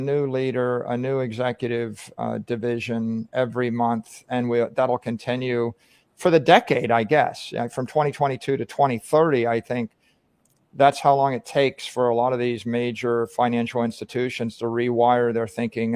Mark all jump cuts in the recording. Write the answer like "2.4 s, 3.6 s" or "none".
none